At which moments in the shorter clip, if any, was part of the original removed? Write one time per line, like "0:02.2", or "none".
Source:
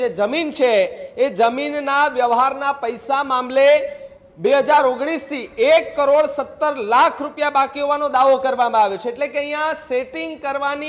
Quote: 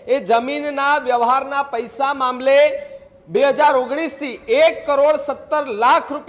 none